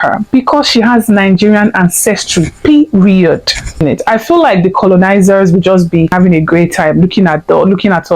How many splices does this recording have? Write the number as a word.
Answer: two